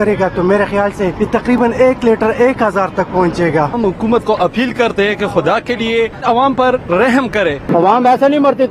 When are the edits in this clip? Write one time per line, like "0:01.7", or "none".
0:01.6
0:03.7
0:06.2
0:07.7